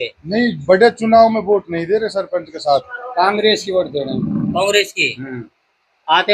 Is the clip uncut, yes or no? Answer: no